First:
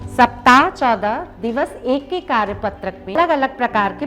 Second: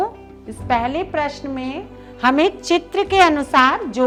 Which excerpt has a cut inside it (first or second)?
first